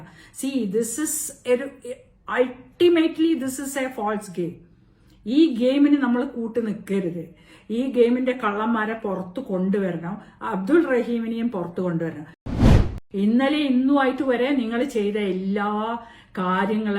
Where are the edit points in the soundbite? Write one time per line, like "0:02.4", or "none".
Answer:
0:12.6

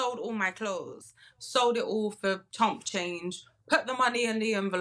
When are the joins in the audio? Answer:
0:01.0

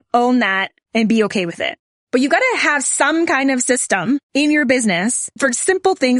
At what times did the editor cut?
0:04.3
0:05.3

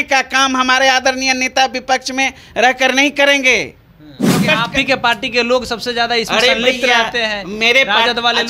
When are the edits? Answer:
0:04.4

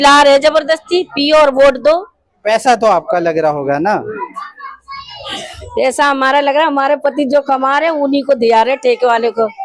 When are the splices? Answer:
none

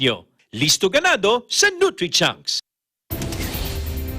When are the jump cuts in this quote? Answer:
0:02.8

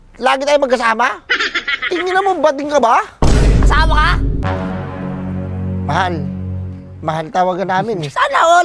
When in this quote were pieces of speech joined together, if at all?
0:04.4

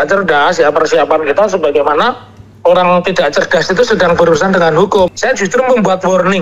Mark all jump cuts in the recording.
0:05.1

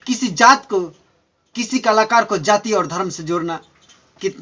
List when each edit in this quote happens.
none

